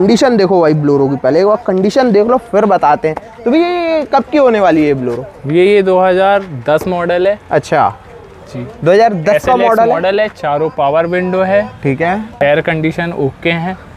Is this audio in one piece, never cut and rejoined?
yes; 0 cuts

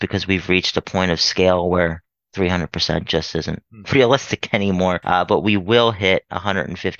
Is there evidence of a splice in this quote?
yes; 1 cut; at 5.0 s

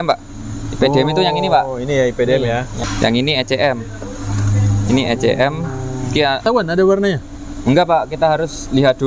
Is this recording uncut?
no; 2 cuts; at 2.7 s, 6.4 s

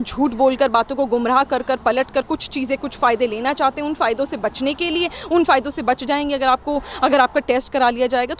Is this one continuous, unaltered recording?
yes; 0 cuts

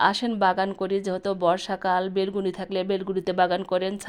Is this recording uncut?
yes; 0 cuts

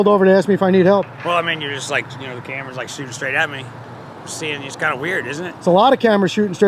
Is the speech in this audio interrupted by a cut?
no; 0 cuts

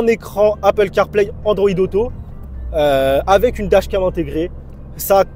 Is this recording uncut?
yes; 0 cuts

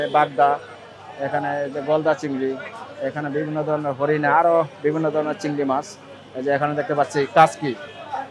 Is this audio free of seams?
yes; 0 cuts

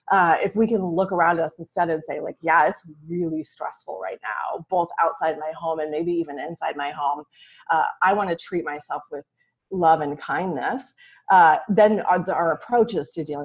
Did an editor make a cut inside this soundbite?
no; 0 cuts

